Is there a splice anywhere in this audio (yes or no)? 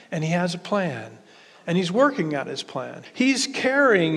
yes